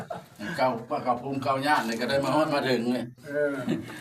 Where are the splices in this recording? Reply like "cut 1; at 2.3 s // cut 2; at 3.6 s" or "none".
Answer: none